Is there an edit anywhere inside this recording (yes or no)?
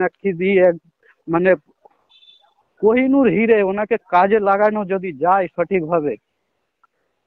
no